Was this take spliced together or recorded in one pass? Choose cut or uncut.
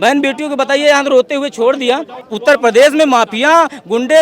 cut